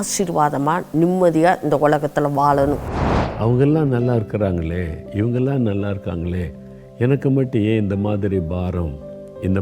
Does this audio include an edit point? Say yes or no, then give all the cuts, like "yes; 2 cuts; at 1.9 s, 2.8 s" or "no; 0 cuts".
yes; 1 cut; at 3.0 s